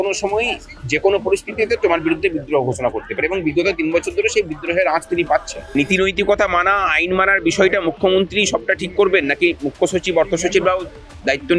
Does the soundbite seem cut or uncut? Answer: cut